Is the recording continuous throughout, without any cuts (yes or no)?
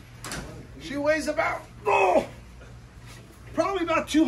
yes